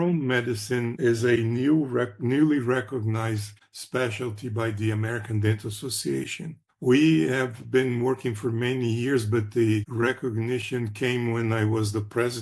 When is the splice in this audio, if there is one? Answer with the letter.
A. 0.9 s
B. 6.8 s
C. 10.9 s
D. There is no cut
A